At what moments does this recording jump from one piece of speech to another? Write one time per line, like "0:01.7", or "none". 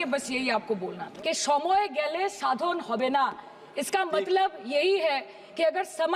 0:01.1